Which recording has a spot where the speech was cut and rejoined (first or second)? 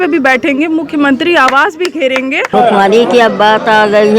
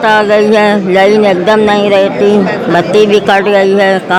first